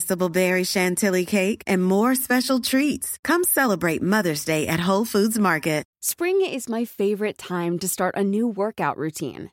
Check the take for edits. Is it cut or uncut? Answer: cut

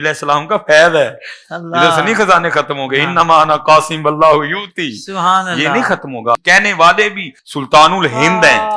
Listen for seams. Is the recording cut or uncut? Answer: uncut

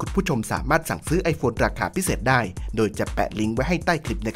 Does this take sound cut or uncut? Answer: uncut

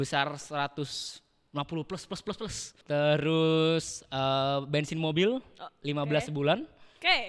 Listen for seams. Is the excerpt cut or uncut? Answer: cut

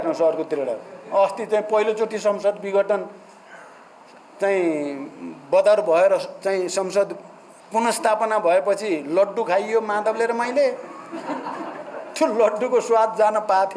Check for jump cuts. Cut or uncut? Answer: uncut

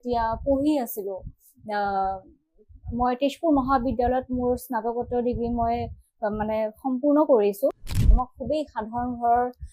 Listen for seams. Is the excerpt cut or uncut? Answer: cut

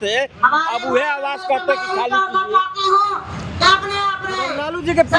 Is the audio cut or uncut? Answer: uncut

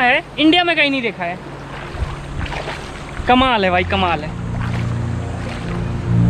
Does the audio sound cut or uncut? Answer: uncut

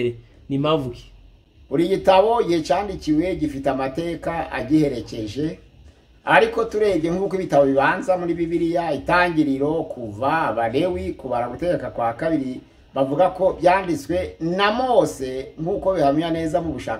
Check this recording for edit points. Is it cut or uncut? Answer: uncut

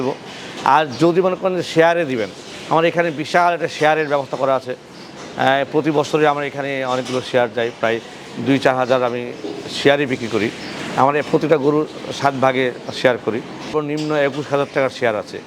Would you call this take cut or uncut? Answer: cut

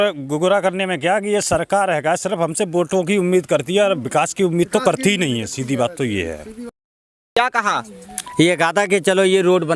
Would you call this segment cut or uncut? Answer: cut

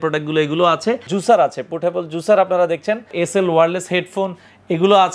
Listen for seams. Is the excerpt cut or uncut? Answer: cut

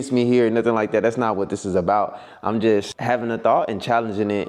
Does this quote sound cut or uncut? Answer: cut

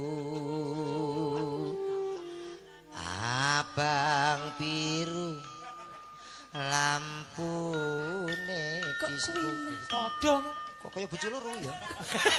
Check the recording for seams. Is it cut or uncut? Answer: uncut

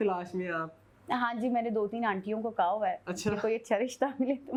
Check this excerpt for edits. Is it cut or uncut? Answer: uncut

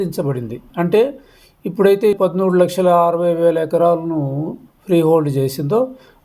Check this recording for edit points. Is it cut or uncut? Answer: cut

